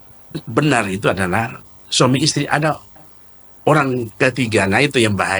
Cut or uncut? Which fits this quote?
uncut